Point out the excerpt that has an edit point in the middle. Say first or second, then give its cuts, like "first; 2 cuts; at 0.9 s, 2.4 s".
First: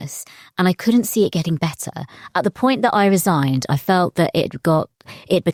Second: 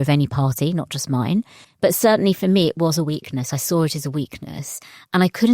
second; 1 cut; at 1.6 s